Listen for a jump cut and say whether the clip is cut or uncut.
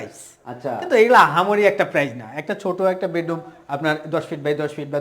uncut